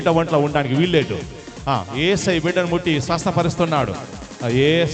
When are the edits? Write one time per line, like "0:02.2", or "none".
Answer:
none